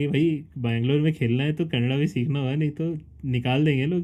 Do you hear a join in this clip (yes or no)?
no